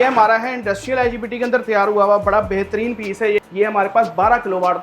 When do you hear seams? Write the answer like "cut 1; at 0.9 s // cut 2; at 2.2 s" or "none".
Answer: cut 1; at 3.4 s